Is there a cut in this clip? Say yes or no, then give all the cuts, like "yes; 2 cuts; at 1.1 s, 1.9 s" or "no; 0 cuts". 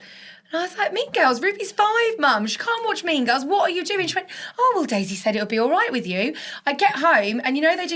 no; 0 cuts